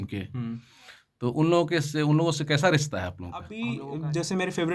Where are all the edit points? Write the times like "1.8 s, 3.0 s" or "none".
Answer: 3.5 s